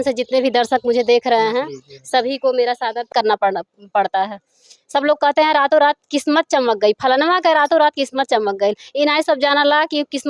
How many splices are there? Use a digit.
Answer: 1